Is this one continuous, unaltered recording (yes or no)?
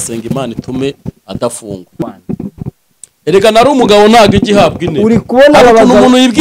no